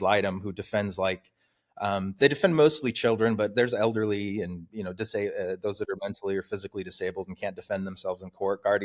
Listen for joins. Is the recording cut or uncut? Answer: uncut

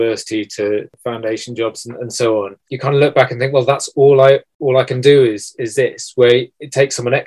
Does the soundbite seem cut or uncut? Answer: cut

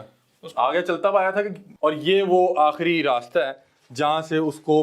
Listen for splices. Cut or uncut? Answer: cut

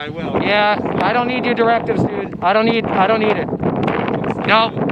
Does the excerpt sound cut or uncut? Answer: uncut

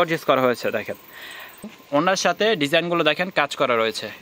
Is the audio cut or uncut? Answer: cut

